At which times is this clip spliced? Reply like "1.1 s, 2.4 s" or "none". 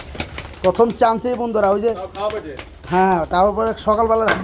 none